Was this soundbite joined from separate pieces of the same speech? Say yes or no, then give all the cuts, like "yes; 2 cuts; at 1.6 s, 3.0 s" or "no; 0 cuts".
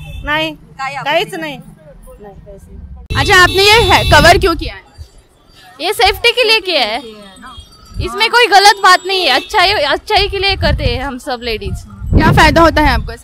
no; 0 cuts